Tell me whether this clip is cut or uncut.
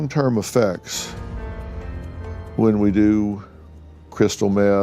uncut